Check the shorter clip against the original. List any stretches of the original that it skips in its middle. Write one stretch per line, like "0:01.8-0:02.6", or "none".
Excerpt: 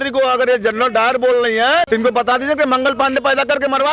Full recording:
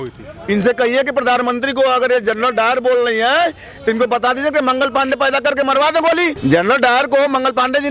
0:03.5-0:03.8